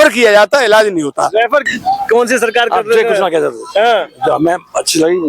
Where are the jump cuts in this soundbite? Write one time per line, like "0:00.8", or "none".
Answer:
0:01.2